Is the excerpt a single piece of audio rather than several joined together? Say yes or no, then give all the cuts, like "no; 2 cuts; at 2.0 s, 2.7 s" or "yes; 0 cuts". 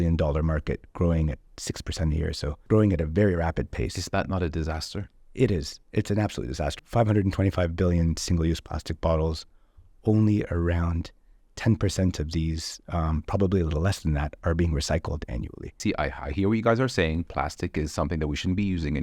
no; 3 cuts; at 2.6 s, 6.7 s, 15.8 s